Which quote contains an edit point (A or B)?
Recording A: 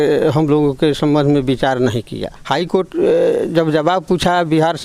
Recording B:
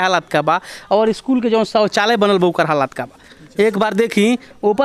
A